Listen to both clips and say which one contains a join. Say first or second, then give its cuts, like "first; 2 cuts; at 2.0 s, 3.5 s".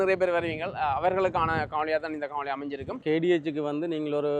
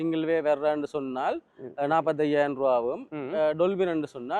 first; 1 cut; at 3.0 s